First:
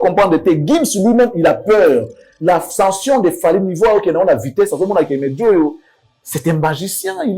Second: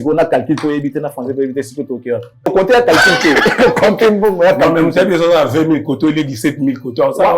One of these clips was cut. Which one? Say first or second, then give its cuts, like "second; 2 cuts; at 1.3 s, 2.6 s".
second; 1 cut; at 2.5 s